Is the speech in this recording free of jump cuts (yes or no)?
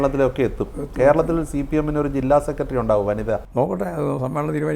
no